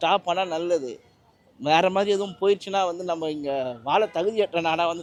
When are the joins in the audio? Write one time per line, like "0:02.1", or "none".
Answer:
none